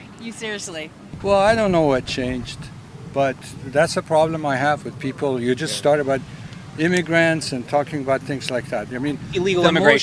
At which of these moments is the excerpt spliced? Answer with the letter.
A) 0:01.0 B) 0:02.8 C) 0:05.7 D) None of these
A